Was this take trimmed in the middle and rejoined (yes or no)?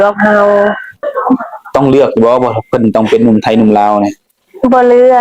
yes